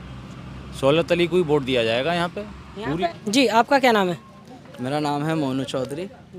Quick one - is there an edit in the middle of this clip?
no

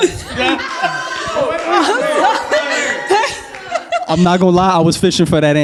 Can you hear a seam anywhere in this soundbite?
no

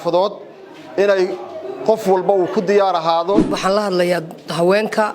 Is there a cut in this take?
yes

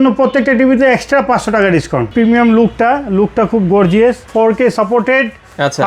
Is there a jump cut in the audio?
yes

